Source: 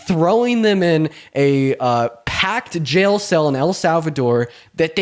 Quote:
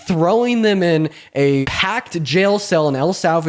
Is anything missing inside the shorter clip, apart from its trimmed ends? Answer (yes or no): yes